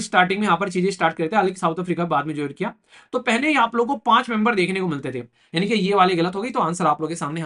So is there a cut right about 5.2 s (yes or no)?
yes